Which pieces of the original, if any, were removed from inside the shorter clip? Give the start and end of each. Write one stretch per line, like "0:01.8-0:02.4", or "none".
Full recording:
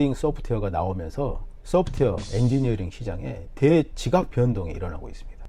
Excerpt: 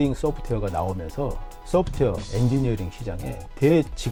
none